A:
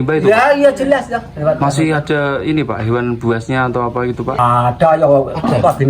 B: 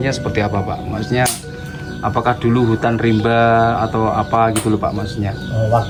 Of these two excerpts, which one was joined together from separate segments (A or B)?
A